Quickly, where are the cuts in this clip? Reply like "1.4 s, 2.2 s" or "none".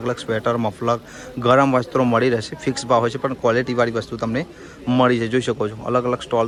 none